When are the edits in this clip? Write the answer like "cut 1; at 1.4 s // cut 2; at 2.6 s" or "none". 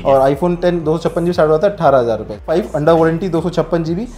cut 1; at 2.5 s